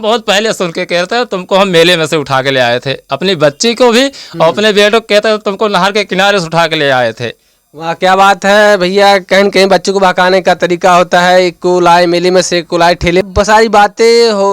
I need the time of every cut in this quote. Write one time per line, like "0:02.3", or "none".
0:13.2

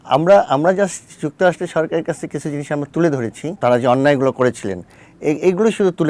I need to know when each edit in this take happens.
0:03.5

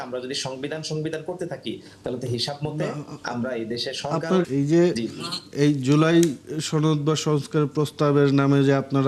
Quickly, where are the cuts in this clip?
0:04.5

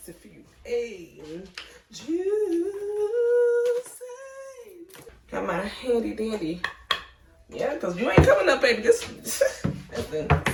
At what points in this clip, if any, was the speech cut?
none

